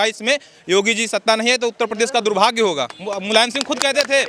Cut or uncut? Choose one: cut